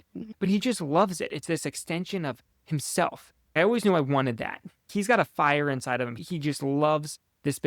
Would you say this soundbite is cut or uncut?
cut